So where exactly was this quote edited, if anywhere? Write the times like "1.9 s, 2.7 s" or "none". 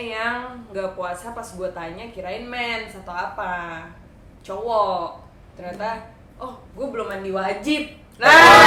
none